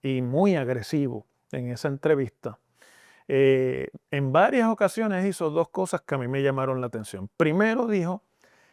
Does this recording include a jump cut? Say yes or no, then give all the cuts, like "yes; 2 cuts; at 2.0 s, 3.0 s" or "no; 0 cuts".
no; 0 cuts